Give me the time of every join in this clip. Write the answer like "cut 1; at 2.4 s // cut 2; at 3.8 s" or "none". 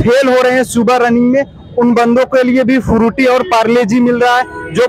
none